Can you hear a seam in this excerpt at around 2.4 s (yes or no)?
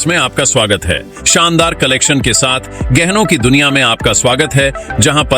no